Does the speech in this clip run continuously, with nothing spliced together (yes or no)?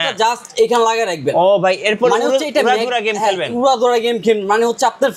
yes